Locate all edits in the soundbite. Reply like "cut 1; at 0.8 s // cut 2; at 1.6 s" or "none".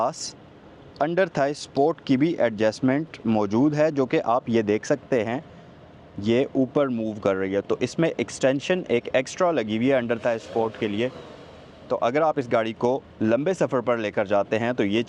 none